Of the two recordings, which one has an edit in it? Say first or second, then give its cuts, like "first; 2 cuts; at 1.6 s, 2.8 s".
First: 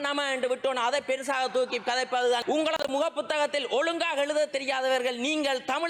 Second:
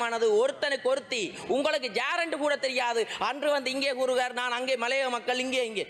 first; 1 cut; at 2.4 s